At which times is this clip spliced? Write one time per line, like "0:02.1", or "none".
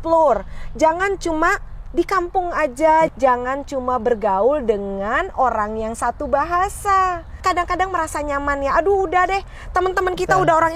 0:03.1
0:07.4